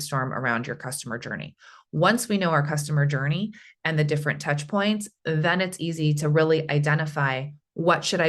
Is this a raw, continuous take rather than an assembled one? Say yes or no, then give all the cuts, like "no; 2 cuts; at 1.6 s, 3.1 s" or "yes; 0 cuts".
yes; 0 cuts